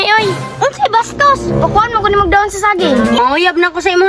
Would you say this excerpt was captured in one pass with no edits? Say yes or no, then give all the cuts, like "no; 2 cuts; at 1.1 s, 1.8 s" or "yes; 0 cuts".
no; 1 cut; at 3.2 s